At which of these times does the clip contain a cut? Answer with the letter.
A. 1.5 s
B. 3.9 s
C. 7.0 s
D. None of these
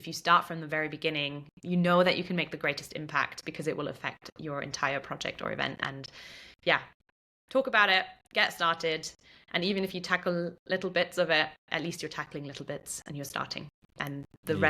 A